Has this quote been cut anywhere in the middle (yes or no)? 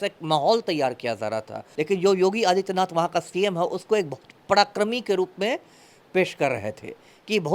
yes